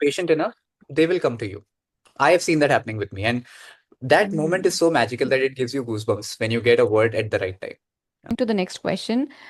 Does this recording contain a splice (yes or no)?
yes